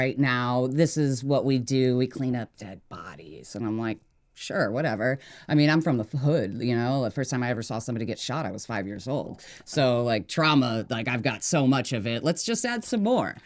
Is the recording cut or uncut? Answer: uncut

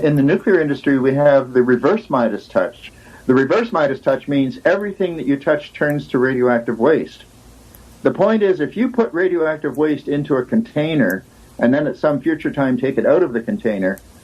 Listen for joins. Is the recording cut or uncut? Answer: cut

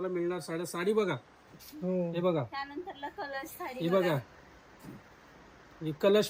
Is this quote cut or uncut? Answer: uncut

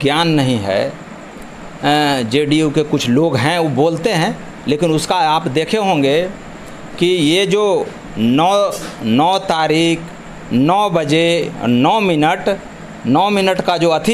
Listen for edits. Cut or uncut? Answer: uncut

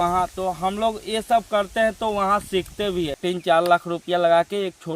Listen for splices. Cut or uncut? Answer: cut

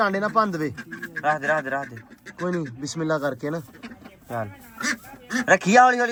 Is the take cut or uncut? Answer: uncut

